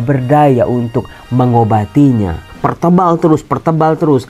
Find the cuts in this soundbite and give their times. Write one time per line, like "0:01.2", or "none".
0:02.4